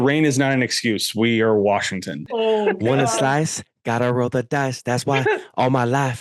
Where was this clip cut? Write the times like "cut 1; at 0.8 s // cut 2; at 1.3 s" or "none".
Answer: cut 1; at 2.2 s